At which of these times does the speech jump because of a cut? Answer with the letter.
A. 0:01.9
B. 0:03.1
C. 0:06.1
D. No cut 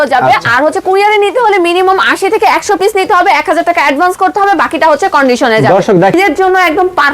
C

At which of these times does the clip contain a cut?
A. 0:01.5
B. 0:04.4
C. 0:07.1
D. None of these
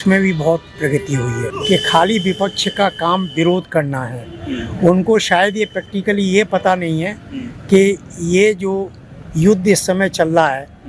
A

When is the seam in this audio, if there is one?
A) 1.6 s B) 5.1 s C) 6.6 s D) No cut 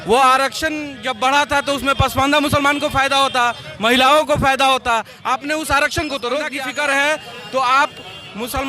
C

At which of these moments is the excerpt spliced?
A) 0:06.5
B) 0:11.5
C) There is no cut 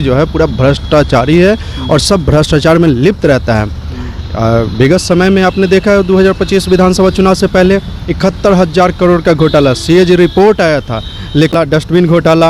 B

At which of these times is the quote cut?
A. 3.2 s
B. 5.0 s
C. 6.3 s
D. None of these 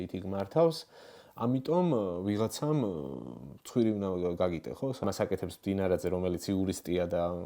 B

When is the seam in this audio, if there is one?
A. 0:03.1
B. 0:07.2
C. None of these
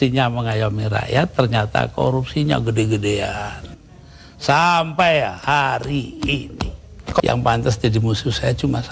B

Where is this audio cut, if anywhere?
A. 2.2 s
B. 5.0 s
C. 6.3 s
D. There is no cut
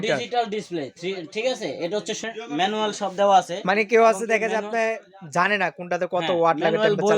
A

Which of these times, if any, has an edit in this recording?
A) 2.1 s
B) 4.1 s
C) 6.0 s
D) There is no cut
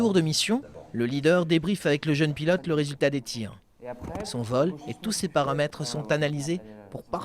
B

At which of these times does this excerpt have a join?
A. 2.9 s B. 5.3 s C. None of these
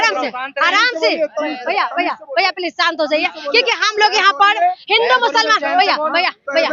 C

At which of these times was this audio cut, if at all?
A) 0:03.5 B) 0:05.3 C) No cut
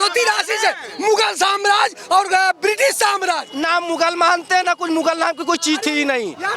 A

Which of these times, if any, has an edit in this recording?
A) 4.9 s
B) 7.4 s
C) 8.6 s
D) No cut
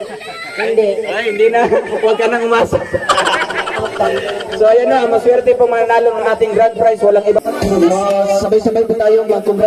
B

